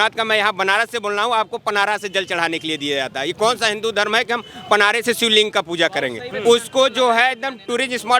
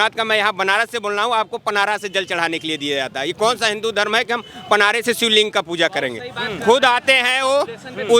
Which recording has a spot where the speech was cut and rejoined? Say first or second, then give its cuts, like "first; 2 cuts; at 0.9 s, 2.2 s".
first; 1 cut; at 6.2 s